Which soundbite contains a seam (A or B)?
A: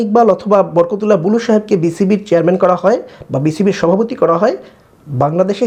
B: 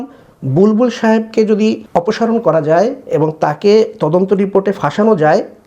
B